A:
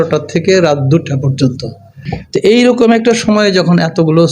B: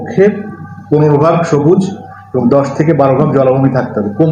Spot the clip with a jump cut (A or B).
A